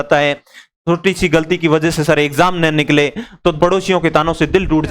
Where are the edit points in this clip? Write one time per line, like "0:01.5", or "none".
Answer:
0:03.6

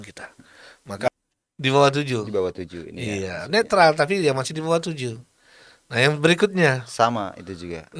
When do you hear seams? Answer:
0:01.1

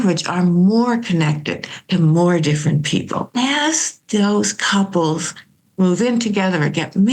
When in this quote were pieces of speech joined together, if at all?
0:03.3

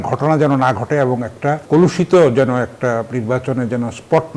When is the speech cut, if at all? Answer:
0:01.6

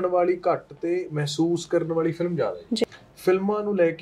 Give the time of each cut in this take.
0:02.8

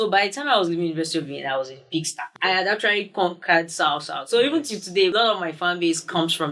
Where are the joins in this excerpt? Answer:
0:02.2
0:05.1

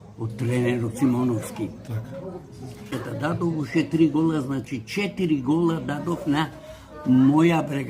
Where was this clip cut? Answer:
0:03.0

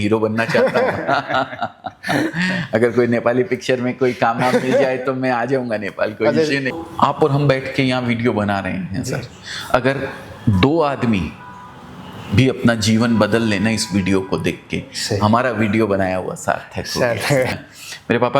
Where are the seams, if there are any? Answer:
0:06.7
0:17.5

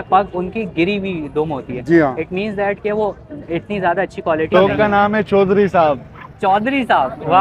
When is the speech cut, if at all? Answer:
0:04.5

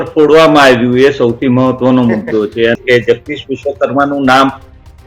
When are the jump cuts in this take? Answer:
0:02.7

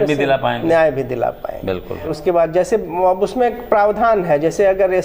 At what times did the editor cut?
0:02.1

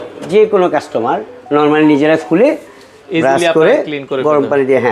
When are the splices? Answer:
none

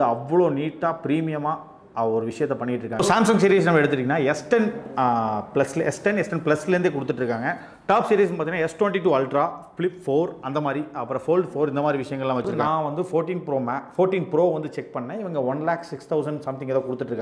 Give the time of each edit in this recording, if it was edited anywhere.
0:03.0
0:12.6

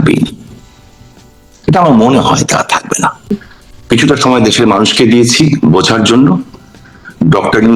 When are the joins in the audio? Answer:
0:03.4

